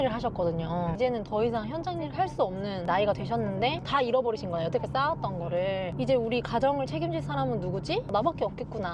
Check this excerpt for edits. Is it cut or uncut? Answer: cut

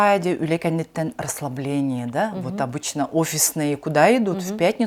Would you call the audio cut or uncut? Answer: uncut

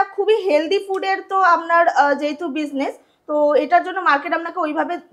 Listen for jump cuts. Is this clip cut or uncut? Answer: uncut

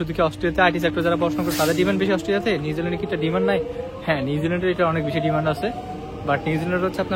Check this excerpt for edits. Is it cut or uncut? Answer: uncut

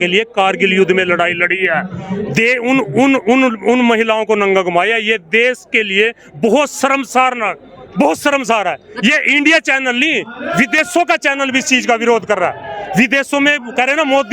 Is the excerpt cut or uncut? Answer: uncut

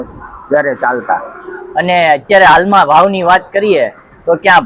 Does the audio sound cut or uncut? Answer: uncut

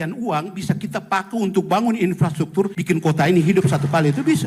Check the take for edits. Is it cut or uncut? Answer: cut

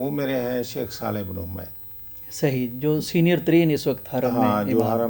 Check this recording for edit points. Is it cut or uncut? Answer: uncut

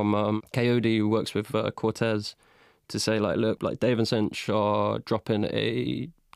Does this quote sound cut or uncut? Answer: cut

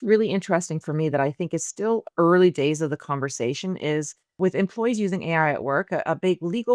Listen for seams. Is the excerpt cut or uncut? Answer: uncut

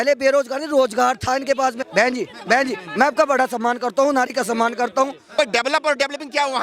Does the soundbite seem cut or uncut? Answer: cut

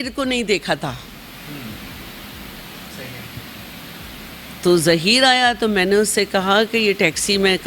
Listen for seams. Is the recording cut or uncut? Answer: uncut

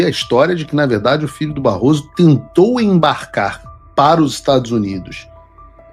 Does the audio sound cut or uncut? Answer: uncut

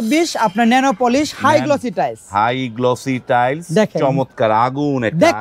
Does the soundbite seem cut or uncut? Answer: uncut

